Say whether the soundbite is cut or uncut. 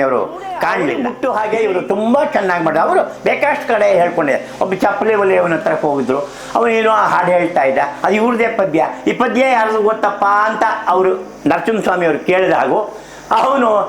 cut